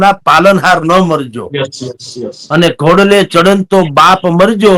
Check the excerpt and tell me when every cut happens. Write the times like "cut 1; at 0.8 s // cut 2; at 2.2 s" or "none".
none